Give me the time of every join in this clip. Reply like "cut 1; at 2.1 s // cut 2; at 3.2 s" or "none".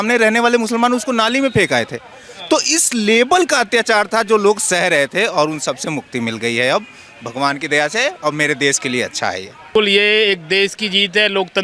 cut 1; at 9.7 s